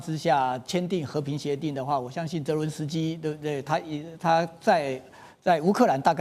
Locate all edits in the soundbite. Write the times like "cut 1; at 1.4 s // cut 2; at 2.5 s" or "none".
none